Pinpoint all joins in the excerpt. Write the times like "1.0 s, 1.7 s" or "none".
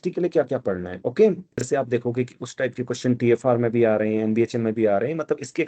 1.6 s

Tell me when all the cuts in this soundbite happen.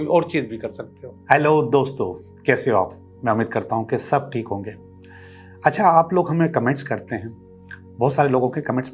1.1 s

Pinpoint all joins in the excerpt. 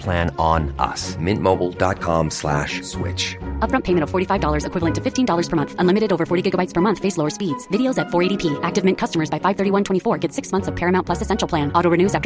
none

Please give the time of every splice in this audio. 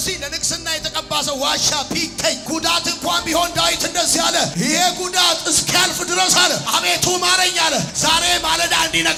none

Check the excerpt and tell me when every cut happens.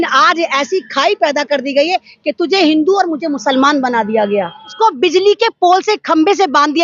4.6 s

